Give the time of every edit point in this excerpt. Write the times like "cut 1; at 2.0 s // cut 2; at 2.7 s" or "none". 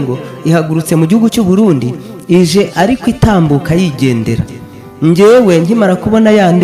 none